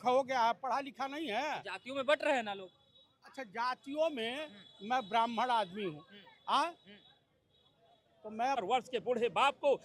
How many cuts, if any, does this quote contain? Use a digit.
1